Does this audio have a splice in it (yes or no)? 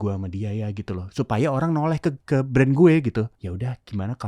yes